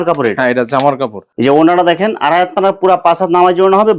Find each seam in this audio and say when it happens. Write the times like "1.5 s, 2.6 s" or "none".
none